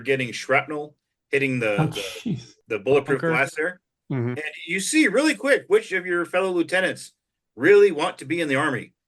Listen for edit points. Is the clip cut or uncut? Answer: cut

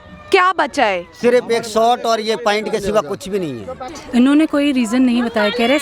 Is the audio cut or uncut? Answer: cut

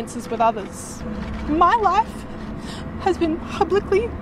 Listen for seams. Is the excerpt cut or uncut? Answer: cut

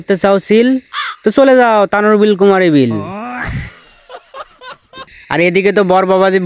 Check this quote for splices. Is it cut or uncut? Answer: cut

